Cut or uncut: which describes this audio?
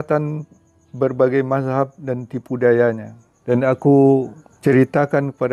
cut